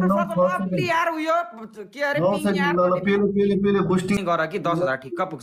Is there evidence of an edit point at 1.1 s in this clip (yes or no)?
no